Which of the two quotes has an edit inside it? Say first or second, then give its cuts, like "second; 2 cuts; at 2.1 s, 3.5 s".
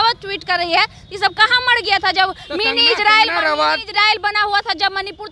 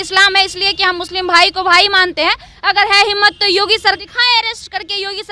second; 1 cut; at 4.0 s